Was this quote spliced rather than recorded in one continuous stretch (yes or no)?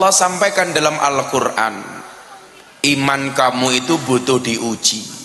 no